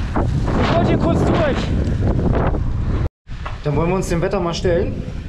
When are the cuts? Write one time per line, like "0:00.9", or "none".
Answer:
0:03.0